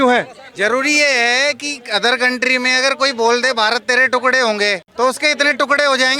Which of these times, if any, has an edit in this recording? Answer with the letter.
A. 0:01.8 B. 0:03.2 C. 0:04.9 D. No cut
C